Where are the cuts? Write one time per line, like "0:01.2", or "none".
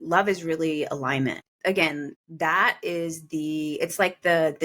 0:01.5
0:02.2